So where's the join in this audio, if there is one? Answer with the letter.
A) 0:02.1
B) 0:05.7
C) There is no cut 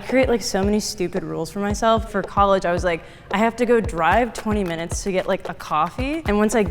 A